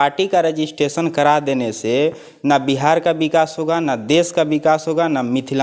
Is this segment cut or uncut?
uncut